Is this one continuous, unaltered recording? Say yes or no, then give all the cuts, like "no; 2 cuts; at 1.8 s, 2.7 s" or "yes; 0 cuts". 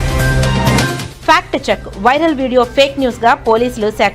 no; 1 cut; at 0.9 s